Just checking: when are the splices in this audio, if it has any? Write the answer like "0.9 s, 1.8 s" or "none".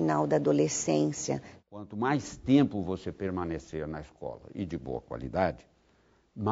1.5 s